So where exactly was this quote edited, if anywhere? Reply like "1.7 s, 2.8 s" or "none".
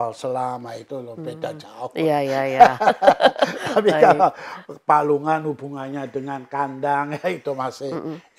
none